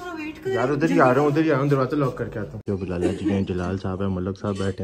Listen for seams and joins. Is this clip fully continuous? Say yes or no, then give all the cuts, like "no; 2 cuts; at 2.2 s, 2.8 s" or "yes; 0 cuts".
no; 1 cut; at 2.6 s